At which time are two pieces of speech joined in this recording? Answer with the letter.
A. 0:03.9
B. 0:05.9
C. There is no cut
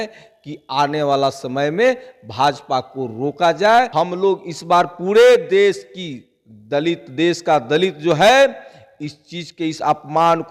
A